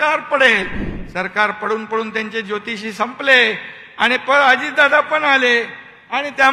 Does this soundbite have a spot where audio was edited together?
no; 0 cuts

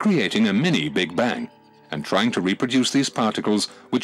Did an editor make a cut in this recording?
yes; 1 cut; at 1.5 s

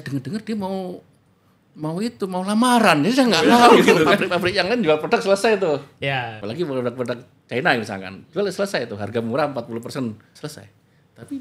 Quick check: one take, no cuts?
no; 3 cuts; at 4.2 s, 6.4 s, 10.3 s

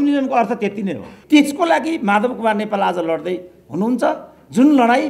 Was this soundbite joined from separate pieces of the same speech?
yes; 1 cut; at 1.2 s

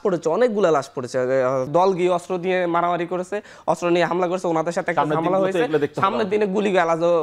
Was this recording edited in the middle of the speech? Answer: yes; 1 cut; at 1.7 s

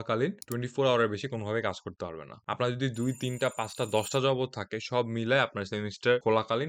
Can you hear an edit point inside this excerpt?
no; 0 cuts

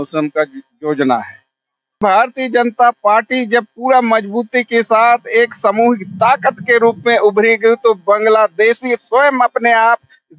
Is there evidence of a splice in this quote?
yes; 1 cut; at 2.0 s

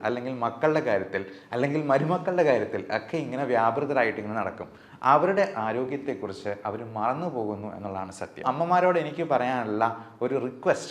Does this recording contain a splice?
yes; 1 cut; at 8.4 s

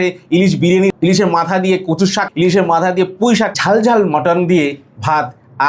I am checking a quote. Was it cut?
yes; 3 cuts; at 0.9 s, 2.3 s, 3.5 s

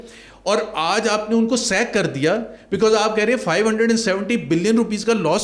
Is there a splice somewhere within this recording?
no; 0 cuts

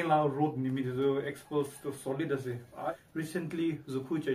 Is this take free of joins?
no; 1 cut; at 2.9 s

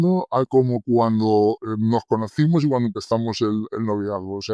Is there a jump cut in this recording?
no; 0 cuts

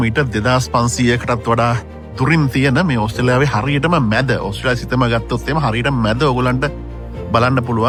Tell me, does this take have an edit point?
no; 0 cuts

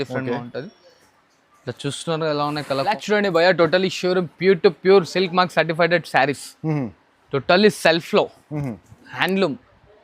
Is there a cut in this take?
yes; 1 cut; at 3.0 s

